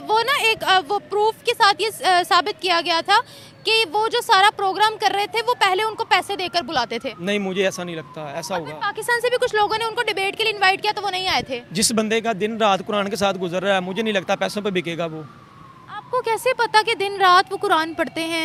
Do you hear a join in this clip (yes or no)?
no